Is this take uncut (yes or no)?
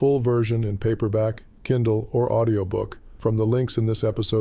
no